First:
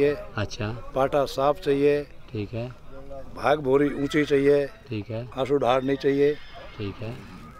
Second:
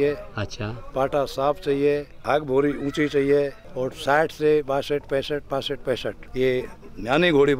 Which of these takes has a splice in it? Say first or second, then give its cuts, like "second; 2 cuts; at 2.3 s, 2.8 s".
second; 3 cuts; at 2.1 s, 3.6 s, 6.2 s